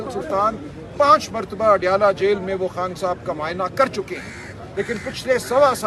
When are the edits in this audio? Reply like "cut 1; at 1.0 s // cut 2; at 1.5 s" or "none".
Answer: none